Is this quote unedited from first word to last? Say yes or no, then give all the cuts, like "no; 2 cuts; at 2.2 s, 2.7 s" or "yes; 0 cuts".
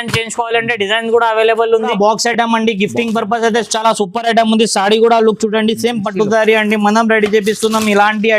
no; 1 cut; at 1.9 s